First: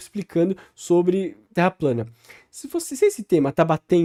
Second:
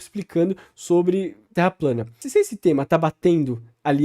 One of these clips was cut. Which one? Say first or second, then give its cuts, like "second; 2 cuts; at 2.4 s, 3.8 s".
second; 1 cut; at 2.2 s